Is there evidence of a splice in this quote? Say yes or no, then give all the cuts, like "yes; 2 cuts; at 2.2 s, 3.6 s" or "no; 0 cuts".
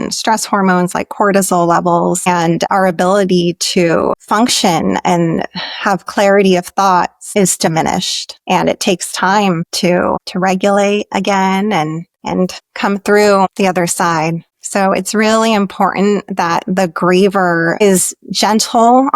yes; 1 cut; at 4.2 s